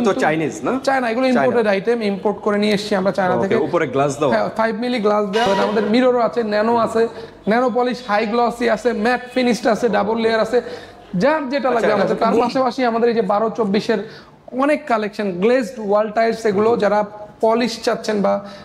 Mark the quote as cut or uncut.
cut